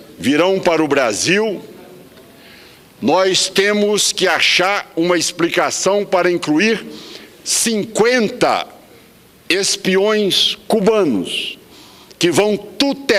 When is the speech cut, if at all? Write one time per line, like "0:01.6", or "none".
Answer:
none